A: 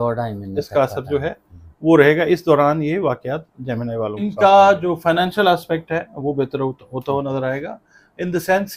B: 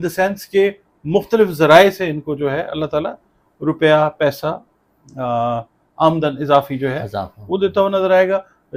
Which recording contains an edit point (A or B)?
A